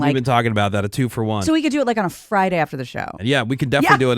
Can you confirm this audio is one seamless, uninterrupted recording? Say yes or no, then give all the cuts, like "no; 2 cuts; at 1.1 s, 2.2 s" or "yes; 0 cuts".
no; 2 cuts; at 1.4 s, 3.1 s